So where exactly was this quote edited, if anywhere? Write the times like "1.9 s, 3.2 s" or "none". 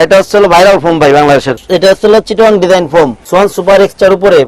1.5 s, 3.2 s